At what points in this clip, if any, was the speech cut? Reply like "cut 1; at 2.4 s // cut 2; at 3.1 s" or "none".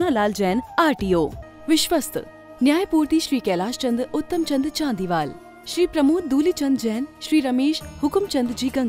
cut 1; at 1.4 s